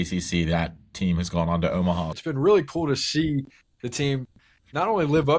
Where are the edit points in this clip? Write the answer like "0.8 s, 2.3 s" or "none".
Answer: 2.1 s